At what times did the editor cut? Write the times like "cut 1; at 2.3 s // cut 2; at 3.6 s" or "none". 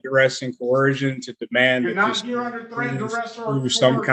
none

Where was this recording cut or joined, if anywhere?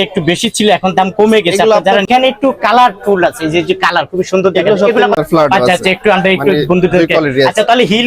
cut 1; at 2.1 s // cut 2; at 5.2 s

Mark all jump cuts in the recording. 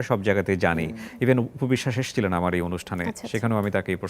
none

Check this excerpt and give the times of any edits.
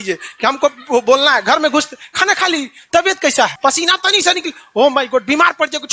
cut 1; at 3.5 s

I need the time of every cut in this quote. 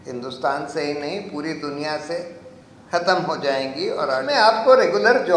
cut 1; at 4.3 s

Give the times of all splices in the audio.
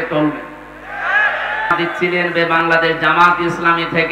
cut 1; at 1.7 s

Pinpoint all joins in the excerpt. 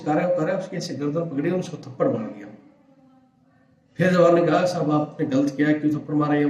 none

